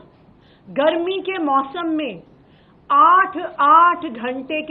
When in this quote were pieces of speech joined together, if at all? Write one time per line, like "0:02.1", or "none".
none